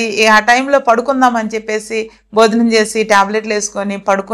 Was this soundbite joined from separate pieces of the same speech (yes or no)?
no